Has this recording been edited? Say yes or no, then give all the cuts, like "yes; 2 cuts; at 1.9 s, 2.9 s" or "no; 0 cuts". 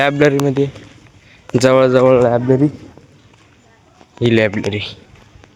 no; 0 cuts